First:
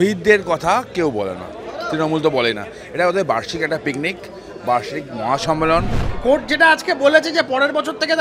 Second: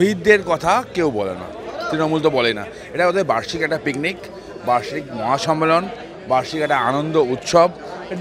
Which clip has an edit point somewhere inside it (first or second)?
first